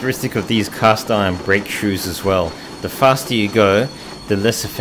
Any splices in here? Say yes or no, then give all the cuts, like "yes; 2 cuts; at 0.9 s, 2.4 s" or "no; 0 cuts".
no; 0 cuts